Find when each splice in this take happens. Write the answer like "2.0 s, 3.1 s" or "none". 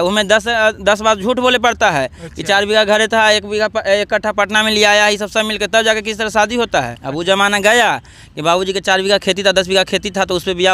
7.0 s